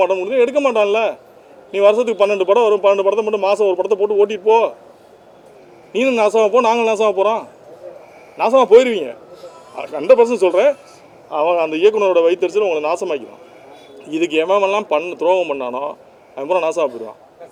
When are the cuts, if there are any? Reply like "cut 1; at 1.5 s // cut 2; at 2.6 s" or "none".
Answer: none